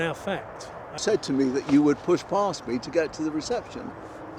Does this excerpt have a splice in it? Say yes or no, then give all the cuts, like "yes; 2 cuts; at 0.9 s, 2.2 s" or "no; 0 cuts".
yes; 1 cut; at 0.9 s